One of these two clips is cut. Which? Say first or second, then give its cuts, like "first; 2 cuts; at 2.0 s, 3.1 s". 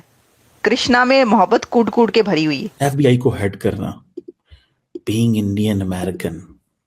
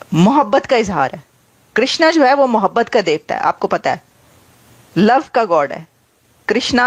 first; 1 cut; at 2.7 s